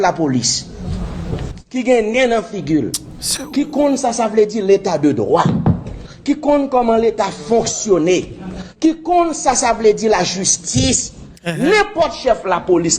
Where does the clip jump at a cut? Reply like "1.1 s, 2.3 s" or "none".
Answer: none